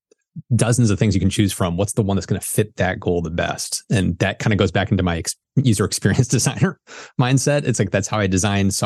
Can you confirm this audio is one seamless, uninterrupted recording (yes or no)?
yes